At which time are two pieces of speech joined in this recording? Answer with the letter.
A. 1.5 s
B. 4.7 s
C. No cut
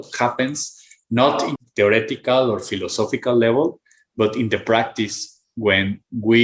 A